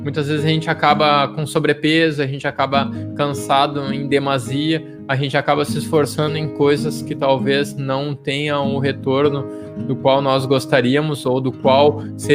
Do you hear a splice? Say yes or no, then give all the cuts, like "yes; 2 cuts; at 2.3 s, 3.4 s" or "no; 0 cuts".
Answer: no; 0 cuts